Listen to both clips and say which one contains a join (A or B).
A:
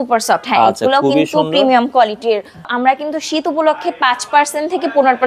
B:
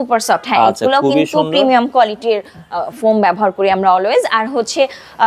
A